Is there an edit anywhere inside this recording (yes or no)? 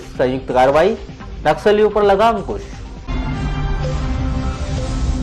no